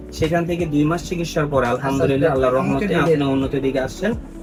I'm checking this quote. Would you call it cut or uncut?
uncut